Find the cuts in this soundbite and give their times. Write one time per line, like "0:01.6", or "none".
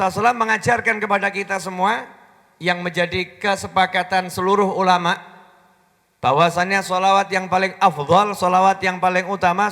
none